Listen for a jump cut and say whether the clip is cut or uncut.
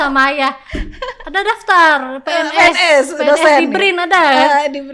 uncut